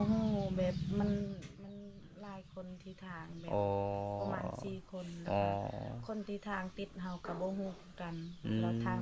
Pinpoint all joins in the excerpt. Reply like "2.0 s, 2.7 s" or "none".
none